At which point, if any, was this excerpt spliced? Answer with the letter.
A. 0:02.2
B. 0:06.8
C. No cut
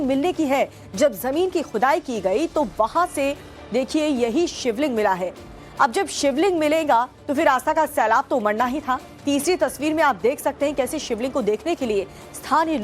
B